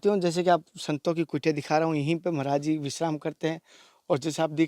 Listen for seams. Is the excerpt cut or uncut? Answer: uncut